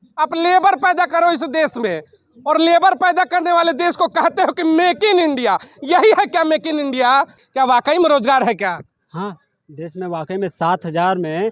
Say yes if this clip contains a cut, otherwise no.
yes